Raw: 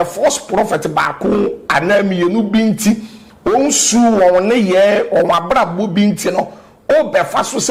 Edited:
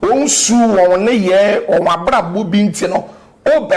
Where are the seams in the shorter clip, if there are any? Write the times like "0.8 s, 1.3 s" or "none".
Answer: none